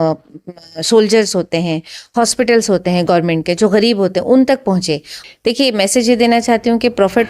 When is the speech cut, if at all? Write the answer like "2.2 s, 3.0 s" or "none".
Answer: 5.1 s

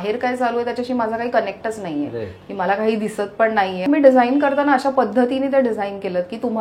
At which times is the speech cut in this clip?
3.8 s

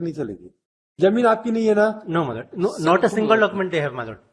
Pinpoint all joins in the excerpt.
none

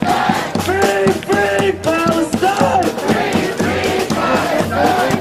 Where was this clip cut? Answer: 1.5 s

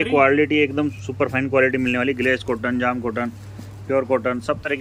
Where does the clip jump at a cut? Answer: none

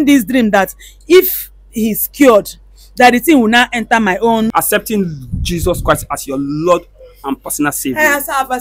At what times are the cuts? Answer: 4.5 s

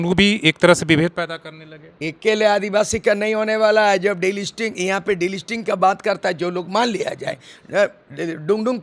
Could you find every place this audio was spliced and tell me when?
none

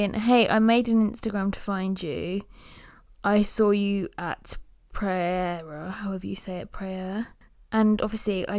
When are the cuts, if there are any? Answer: none

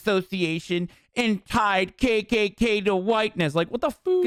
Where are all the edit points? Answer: none

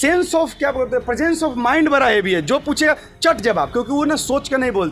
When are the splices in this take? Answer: none

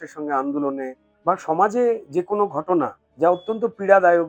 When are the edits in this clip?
1.0 s, 3.0 s

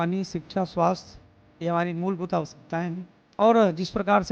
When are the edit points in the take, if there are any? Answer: 3.2 s

